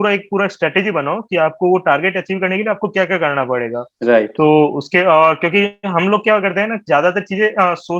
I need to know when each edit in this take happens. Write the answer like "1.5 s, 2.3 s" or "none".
none